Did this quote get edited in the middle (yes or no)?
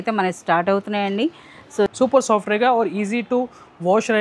yes